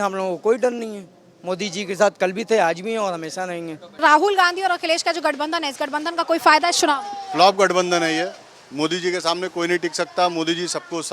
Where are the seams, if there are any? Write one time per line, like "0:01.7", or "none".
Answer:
0:04.0